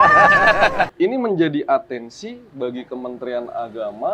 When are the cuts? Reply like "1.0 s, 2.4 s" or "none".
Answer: 0.9 s

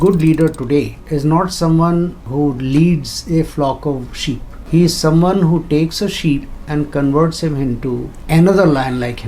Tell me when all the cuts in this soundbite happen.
1.0 s, 2.2 s, 4.5 s, 6.6 s, 8.1 s

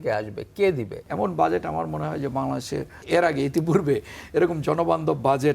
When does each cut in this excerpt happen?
1.0 s, 3.0 s

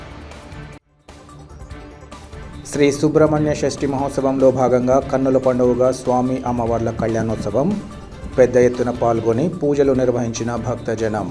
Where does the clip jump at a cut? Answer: 1.8 s

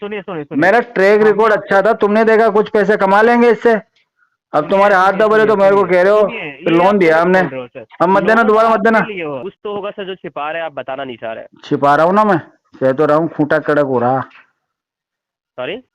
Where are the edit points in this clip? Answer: 9.4 s

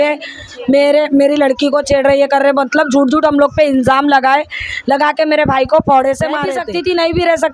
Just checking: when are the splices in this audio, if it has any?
6.6 s

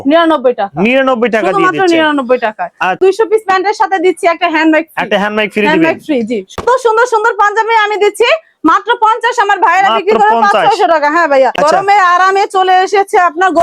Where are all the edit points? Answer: 3.0 s, 6.5 s, 11.5 s

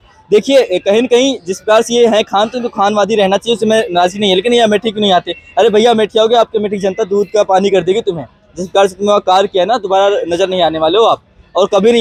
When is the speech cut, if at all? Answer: none

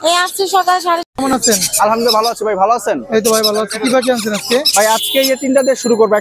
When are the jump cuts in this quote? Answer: 1.0 s

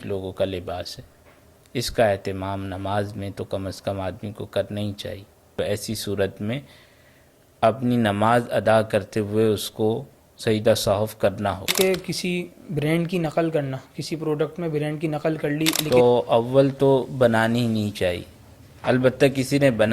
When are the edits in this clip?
5.6 s, 11.7 s, 15.8 s

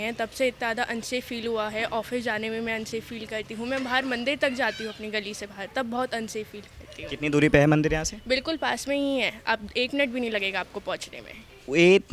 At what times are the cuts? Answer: none

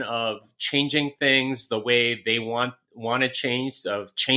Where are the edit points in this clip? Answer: none

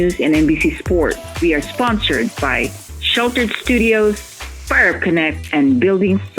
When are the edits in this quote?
1.3 s

